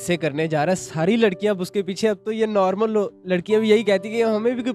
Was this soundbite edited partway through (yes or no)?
no